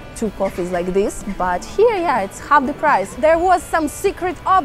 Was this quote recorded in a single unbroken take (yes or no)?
no